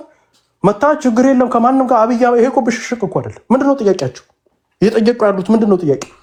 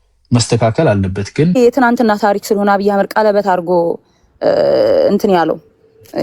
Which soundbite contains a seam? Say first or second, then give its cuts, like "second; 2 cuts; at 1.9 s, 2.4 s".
second; 1 cut; at 1.6 s